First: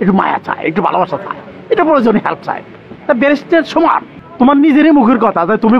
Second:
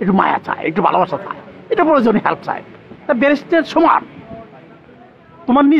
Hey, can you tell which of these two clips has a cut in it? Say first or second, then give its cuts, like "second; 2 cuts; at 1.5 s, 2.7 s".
first; 1 cut; at 4.2 s